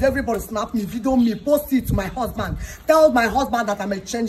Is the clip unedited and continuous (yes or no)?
yes